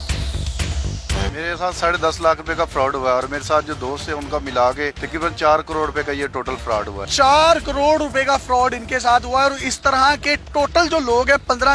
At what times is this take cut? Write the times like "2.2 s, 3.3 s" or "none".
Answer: 1.1 s, 7.0 s